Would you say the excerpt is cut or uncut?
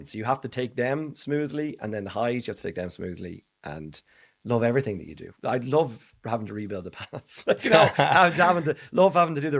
uncut